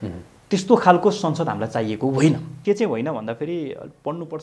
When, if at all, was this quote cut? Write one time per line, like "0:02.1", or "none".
0:02.5